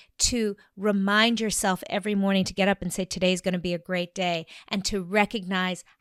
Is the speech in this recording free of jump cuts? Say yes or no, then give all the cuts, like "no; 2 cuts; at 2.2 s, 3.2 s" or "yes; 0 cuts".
yes; 0 cuts